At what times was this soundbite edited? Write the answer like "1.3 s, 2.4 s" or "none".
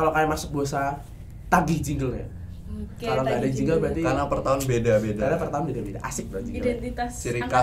none